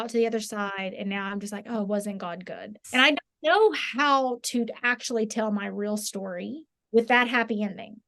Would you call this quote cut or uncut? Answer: uncut